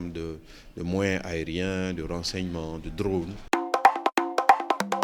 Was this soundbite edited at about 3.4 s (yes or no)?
yes